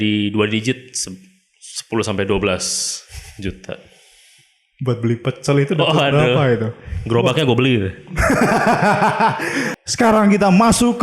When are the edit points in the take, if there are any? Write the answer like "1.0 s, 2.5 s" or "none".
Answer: 9.7 s